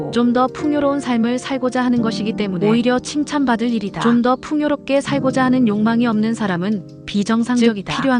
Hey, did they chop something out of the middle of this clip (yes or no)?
no